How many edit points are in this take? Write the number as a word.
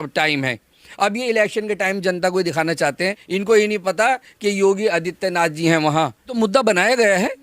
one